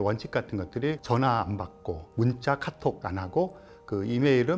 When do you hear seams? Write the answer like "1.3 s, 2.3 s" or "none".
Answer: 1.0 s, 2.1 s, 3.0 s